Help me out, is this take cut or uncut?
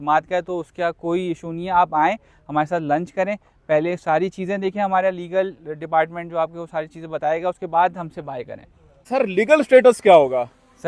uncut